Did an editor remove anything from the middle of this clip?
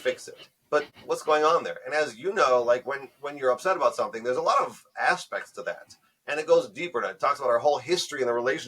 yes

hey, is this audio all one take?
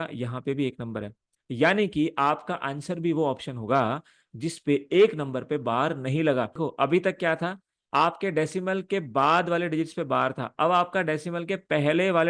no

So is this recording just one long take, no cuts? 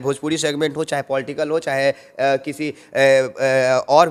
yes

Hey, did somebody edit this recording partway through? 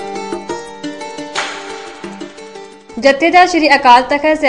yes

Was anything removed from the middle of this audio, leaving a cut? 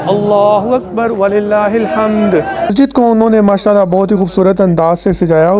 yes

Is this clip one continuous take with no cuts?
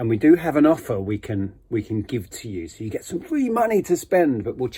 yes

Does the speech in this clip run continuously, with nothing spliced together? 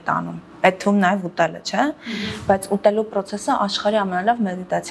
yes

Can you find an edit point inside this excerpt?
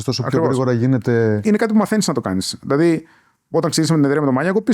yes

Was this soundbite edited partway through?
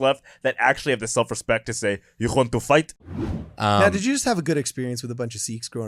yes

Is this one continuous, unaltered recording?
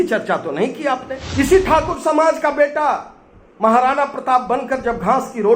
no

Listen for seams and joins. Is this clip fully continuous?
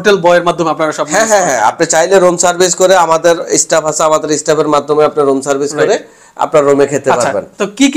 yes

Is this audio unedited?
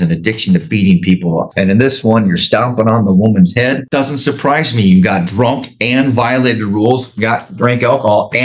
no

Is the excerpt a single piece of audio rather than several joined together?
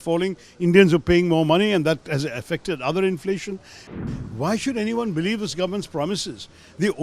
no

